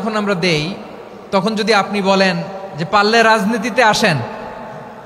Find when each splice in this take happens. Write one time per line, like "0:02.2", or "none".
none

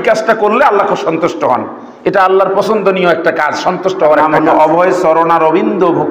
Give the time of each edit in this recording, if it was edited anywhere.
0:04.3

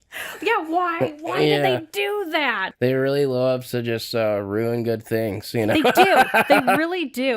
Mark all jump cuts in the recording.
0:02.6

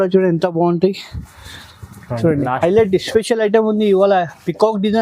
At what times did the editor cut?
0:02.6

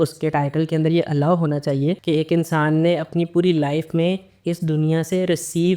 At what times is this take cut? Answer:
0:02.0

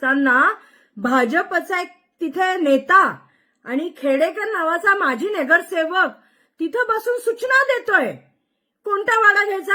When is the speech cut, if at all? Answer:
none

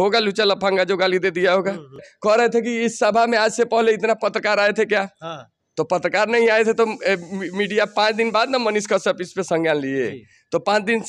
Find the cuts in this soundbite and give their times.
0:02.1

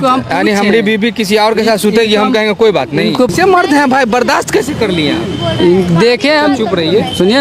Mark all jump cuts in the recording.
0:03.3

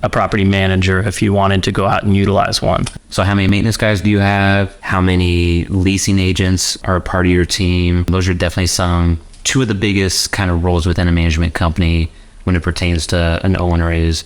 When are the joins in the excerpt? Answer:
0:03.5
0:04.8
0:06.8
0:08.1

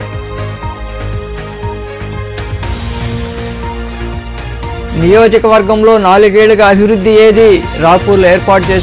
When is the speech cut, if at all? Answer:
0:02.5

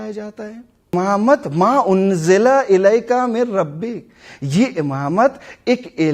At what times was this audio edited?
0:00.9

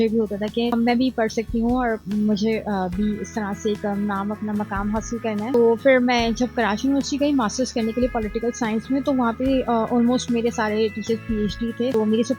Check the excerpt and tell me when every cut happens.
none

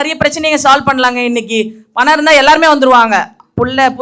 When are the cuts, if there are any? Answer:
none

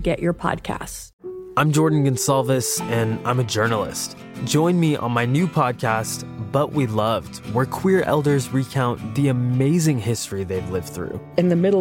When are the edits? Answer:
0:01.0

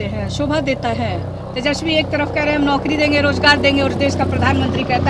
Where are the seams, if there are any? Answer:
none

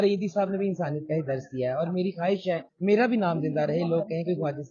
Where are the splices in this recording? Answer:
0:02.7

